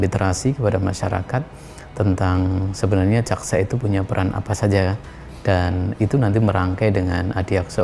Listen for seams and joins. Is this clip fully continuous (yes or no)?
yes